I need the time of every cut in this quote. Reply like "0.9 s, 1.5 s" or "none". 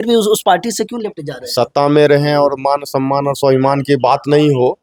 none